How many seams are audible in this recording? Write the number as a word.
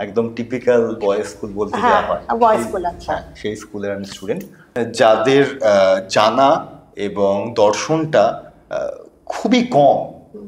one